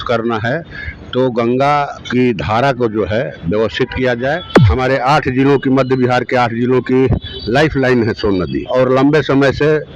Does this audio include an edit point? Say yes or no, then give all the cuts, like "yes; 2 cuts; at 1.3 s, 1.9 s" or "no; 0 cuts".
yes; 3 cuts; at 2.0 s, 4.6 s, 8.6 s